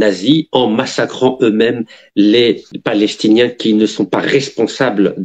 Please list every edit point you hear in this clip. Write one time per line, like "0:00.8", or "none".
0:02.7